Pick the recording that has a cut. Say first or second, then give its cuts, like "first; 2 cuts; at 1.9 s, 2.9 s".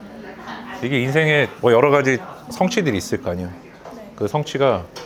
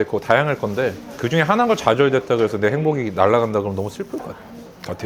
second; 1 cut; at 1.1 s